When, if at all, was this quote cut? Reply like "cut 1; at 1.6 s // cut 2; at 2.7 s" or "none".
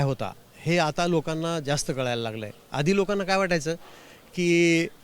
none